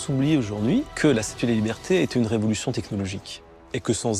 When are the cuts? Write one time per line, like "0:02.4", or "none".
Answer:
0:00.9